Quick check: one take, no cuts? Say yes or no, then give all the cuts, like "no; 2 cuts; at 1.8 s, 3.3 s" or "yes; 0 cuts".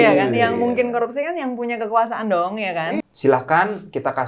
no; 1 cut; at 3.0 s